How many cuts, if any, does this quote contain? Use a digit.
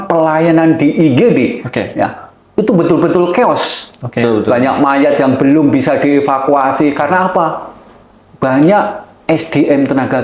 1